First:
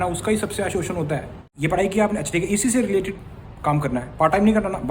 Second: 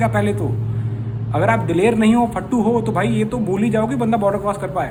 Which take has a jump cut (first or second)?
first